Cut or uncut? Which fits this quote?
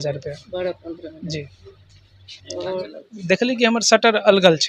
cut